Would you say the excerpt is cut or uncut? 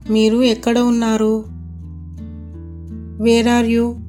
uncut